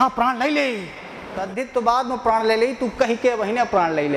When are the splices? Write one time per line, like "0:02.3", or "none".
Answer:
0:01.5